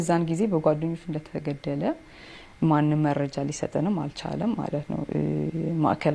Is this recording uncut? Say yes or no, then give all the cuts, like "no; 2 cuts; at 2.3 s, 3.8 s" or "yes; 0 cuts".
yes; 0 cuts